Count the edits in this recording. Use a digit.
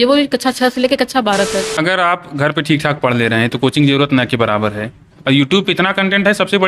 1